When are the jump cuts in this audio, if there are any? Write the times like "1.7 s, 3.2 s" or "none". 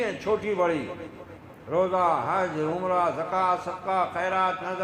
none